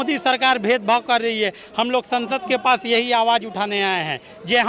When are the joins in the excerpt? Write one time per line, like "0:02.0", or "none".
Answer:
none